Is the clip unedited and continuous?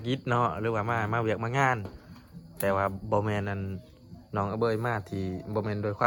yes; 0 cuts

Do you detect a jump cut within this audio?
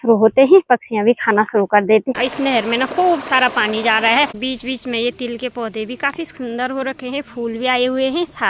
yes; 2 cuts; at 2.1 s, 4.4 s

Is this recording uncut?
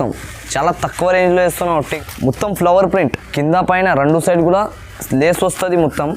no; 2 cuts; at 1.9 s, 3.2 s

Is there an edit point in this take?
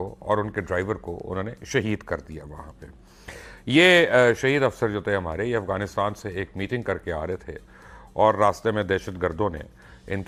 no; 0 cuts

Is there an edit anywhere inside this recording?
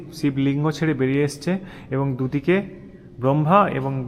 no; 0 cuts

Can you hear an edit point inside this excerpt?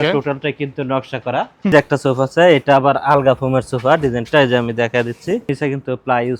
yes; 2 cuts; at 1.7 s, 5.5 s

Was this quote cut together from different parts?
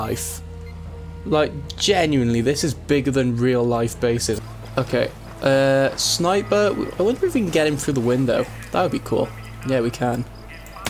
yes; 1 cut; at 4.4 s

